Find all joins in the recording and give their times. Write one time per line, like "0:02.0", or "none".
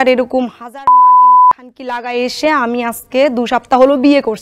none